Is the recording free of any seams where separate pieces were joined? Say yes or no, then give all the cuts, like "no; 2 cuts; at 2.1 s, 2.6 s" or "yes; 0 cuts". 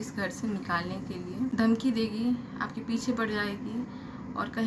no; 1 cut; at 1.5 s